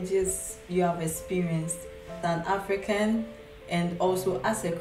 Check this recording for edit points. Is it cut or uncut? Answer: cut